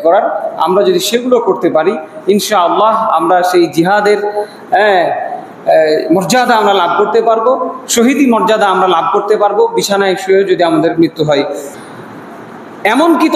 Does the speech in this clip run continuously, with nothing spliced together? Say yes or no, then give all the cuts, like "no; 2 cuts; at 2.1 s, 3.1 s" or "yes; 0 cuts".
no; 1 cut; at 11.7 s